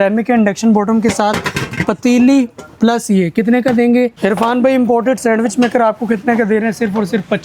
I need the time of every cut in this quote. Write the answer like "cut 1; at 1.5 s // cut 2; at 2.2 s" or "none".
cut 1; at 4.2 s